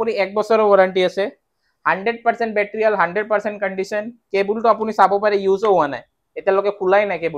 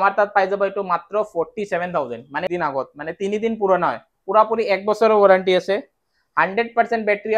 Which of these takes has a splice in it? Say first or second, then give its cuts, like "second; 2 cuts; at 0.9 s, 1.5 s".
second; 1 cut; at 2.5 s